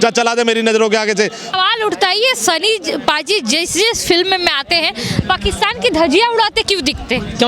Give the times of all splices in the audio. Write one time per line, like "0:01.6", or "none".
0:01.5